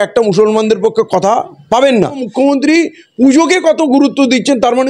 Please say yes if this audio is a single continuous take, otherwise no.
no